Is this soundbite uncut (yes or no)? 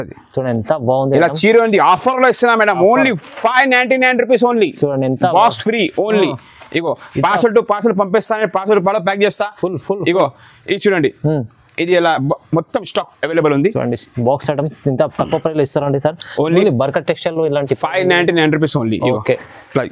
yes